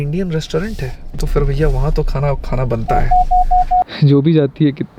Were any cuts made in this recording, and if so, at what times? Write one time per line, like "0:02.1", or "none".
0:03.9